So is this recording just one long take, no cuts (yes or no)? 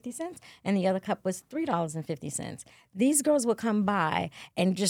yes